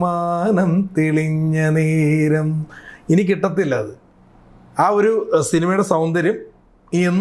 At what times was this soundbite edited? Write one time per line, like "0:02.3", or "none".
none